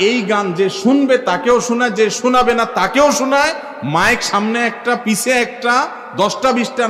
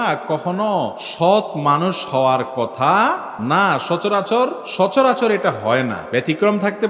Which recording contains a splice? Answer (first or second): second